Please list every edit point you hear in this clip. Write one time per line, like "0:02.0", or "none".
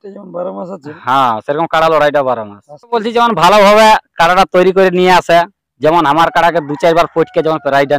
0:03.0